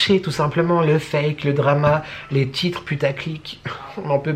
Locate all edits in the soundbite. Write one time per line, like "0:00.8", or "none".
none